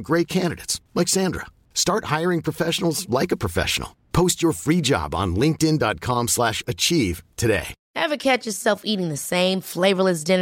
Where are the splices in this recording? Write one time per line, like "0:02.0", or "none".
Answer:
0:07.8